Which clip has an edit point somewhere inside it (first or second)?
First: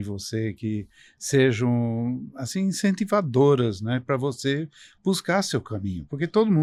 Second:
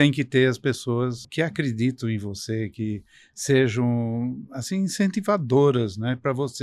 second